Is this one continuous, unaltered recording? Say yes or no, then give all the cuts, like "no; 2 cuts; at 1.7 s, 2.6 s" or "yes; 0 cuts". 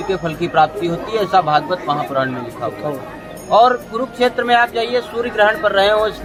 yes; 0 cuts